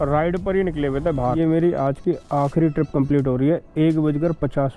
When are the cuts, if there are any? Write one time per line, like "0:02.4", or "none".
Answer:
0:01.2